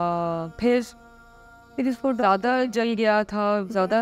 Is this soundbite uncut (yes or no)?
yes